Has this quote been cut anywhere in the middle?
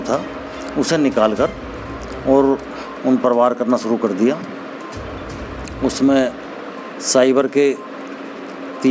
no; 0 cuts

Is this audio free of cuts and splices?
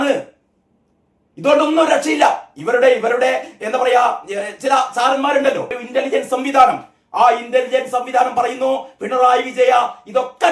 no; 1 cut; at 5.8 s

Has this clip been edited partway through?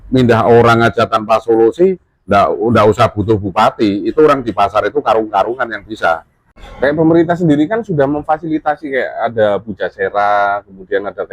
yes; 1 cut; at 6.6 s

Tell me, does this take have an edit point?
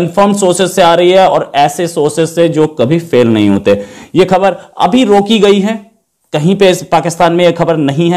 no; 0 cuts

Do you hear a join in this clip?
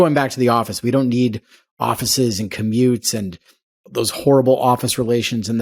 no; 0 cuts

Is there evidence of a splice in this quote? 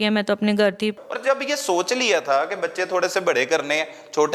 yes; 1 cut; at 0.9 s

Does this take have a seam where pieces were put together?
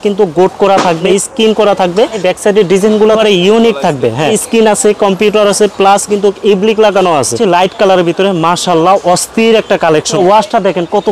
yes; 6 cuts; at 1.0 s, 2.1 s, 3.2 s, 4.4 s, 7.3 s, 10.1 s

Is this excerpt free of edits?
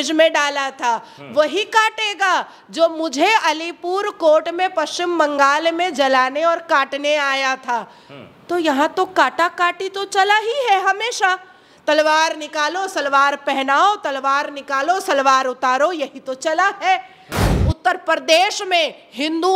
no; 1 cut; at 17.5 s

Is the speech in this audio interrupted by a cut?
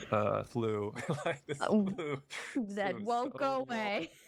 no; 0 cuts

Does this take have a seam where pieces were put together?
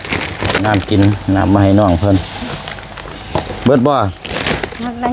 no; 0 cuts

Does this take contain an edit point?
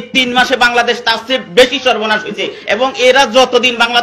no; 0 cuts

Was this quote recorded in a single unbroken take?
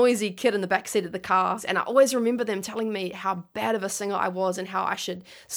no; 1 cut; at 1.6 s

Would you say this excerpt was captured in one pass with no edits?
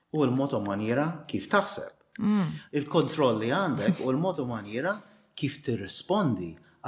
yes; 0 cuts

